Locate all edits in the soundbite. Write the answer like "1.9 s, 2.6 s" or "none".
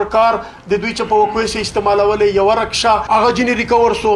3.0 s